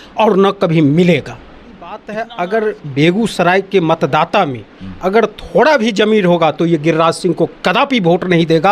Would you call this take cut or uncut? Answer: cut